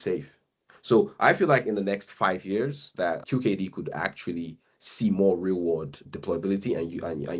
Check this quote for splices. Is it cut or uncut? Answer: uncut